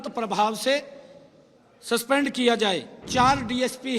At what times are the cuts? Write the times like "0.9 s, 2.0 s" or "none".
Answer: 3.0 s